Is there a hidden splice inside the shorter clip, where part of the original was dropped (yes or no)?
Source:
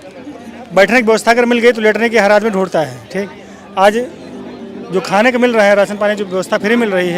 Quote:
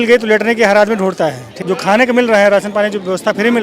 yes